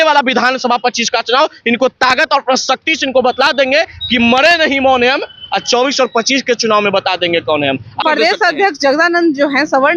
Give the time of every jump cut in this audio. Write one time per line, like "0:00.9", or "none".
0:08.0